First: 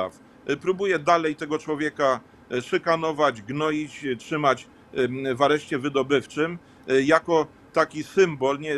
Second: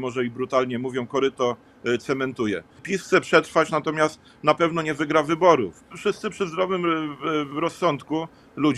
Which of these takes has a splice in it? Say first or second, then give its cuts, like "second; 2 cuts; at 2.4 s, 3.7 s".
second; 2 cuts; at 2.9 s, 5.9 s